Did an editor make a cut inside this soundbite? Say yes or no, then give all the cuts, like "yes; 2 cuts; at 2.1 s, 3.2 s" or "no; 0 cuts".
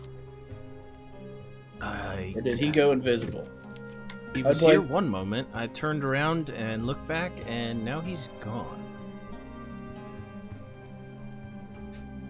no; 0 cuts